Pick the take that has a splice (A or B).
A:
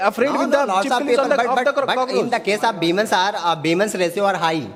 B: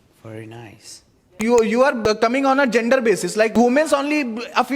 B